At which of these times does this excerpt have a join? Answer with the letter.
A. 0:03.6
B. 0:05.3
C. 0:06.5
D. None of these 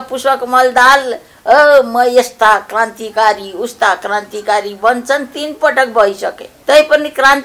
C